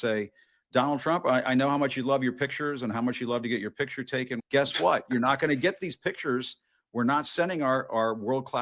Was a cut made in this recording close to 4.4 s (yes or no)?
yes